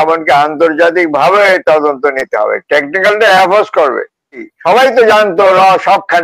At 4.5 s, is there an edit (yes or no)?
yes